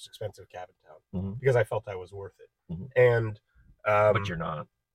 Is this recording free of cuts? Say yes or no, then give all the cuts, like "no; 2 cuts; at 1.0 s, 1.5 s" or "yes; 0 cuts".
yes; 0 cuts